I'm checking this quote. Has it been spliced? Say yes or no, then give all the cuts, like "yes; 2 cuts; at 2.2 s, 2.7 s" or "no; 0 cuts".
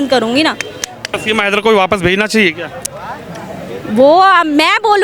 yes; 1 cut; at 1.1 s